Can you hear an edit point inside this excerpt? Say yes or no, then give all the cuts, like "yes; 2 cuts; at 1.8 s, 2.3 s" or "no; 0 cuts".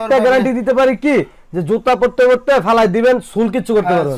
no; 0 cuts